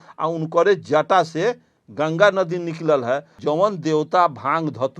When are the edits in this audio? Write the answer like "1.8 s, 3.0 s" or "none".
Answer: 3.3 s